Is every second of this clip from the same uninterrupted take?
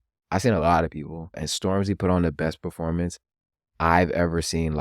no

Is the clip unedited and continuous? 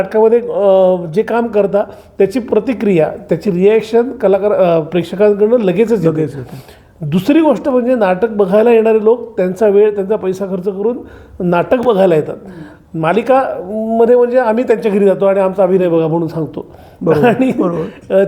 yes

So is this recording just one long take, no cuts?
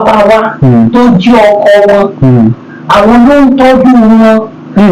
yes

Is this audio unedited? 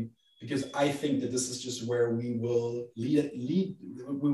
yes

